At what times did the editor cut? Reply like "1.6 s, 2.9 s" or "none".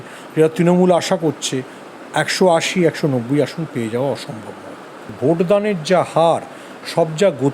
5.0 s